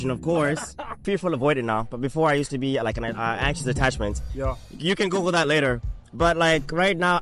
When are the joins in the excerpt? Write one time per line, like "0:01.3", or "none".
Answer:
0:01.0